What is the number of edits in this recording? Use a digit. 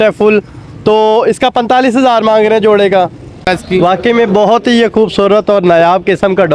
1